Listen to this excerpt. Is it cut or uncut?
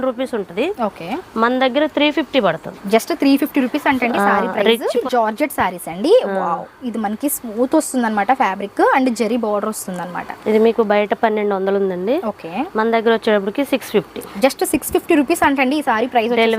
cut